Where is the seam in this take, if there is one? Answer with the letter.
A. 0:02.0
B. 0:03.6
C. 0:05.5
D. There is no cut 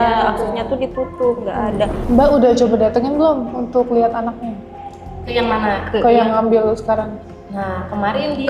A